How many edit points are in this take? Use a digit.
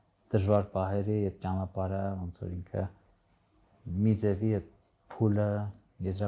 0